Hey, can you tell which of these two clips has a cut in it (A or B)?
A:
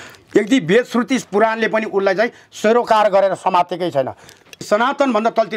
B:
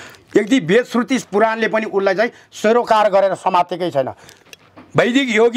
A